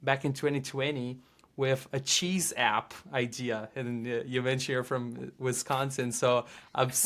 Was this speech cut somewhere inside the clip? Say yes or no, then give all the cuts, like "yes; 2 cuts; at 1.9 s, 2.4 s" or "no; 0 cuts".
no; 0 cuts